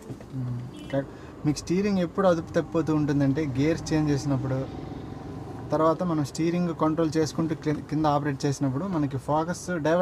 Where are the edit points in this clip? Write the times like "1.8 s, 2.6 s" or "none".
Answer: 1.1 s